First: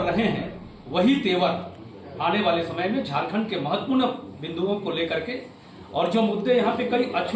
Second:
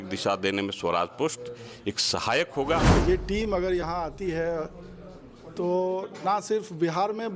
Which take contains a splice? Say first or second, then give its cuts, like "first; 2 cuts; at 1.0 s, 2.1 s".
second; 1 cut; at 2.9 s